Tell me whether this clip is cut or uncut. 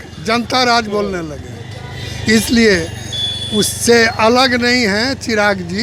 uncut